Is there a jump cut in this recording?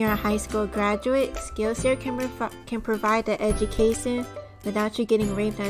yes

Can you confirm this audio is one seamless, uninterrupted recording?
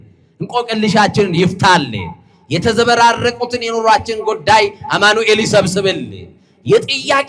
yes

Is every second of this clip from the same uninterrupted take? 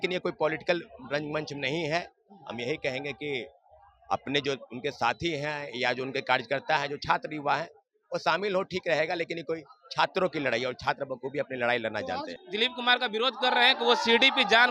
no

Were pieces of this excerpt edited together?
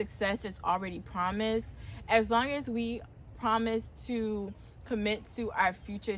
no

